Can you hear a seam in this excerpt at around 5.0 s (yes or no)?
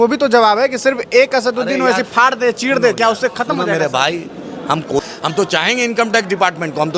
yes